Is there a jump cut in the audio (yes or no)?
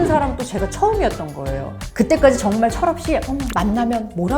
yes